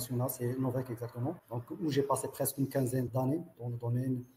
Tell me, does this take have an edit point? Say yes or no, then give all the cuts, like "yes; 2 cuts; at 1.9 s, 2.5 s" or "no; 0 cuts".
yes; 2 cuts; at 1.5 s, 3.1 s